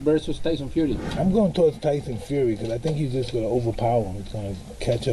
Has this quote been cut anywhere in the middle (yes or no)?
yes